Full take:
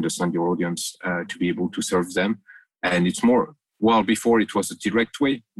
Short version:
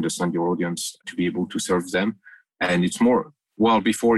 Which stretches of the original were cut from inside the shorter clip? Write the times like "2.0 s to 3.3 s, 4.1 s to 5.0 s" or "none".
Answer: 1.0 s to 1.2 s